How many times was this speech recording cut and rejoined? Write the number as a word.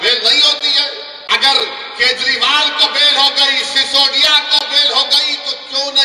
one